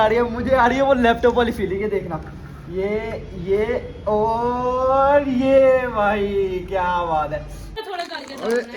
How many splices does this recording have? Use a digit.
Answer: 1